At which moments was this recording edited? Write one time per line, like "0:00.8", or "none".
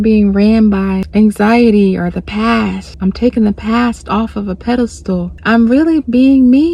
0:01.0
0:02.9
0:05.3